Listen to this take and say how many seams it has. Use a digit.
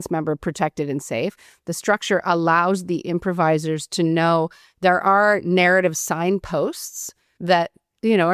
0